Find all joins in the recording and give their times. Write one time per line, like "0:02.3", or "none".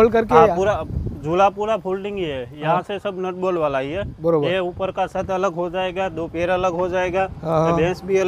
none